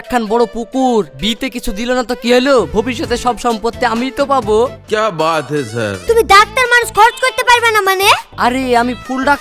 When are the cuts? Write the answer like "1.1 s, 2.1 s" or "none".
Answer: 5.9 s